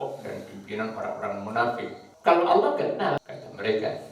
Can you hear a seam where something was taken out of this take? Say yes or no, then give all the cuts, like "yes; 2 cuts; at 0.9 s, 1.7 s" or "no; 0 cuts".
yes; 2 cuts; at 2.0 s, 3.2 s